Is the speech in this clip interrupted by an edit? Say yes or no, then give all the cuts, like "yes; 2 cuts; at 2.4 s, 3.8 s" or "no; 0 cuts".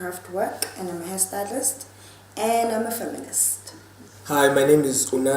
yes; 1 cut; at 0.9 s